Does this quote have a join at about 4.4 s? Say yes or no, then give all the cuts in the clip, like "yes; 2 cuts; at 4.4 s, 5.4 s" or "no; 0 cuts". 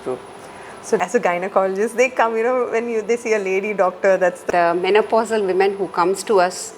yes; 2 cuts; at 1.0 s, 4.4 s